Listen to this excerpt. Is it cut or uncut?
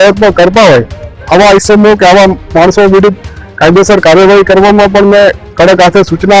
uncut